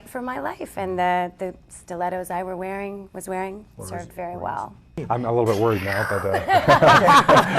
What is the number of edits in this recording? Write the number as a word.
one